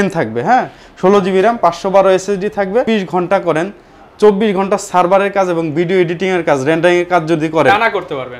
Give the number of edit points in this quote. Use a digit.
1